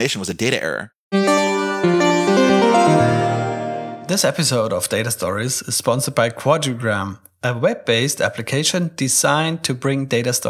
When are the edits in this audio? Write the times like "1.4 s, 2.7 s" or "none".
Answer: 0.9 s, 3.9 s